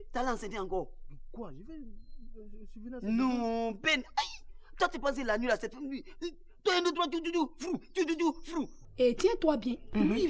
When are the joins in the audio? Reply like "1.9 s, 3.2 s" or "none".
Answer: 8.8 s